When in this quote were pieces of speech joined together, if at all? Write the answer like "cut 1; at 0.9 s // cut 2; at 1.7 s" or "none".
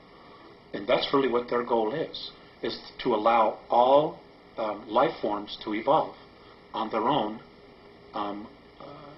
cut 1; at 5.2 s

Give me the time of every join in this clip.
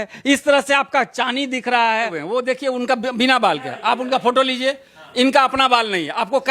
cut 1; at 2.2 s

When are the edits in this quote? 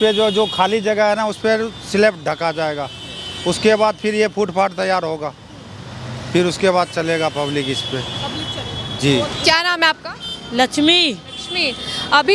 none

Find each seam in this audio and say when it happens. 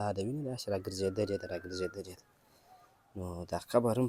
none

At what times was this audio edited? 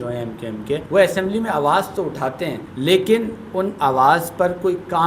cut 1; at 0.8 s // cut 2; at 2.6 s

